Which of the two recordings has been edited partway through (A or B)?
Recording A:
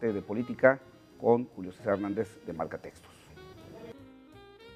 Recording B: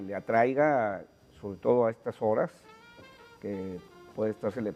B